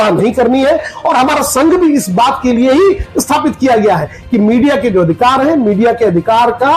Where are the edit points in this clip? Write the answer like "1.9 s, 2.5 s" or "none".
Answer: 0.9 s